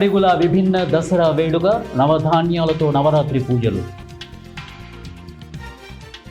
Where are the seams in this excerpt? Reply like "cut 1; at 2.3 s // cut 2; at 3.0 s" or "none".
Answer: cut 1; at 4.0 s // cut 2; at 5.4 s